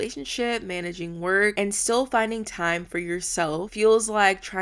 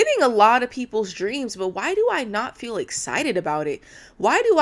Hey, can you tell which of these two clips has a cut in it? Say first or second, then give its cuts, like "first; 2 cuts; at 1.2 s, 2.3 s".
first; 2 cuts; at 1.5 s, 3.7 s